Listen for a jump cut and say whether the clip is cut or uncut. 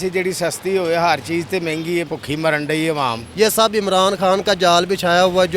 cut